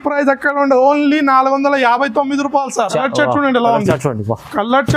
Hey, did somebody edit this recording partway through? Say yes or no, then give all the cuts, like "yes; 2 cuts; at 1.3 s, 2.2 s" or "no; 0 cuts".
yes; 1 cut; at 2.9 s